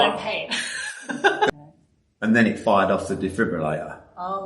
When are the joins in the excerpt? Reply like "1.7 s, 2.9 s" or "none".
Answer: 1.5 s